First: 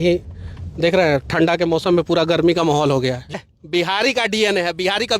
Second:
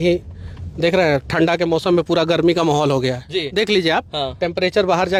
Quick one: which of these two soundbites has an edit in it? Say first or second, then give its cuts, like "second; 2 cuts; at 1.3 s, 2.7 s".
first; 1 cut; at 3.4 s